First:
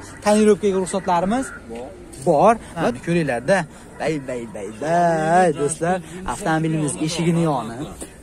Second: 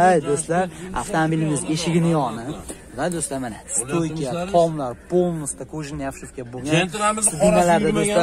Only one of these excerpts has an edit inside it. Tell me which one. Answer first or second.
first